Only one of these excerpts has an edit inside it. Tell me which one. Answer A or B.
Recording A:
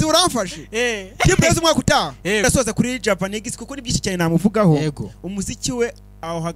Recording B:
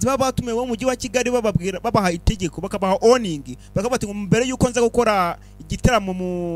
A